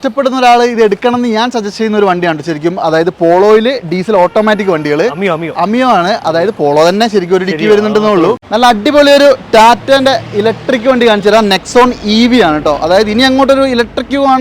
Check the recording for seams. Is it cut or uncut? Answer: cut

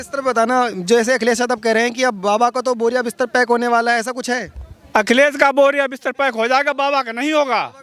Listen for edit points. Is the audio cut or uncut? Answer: uncut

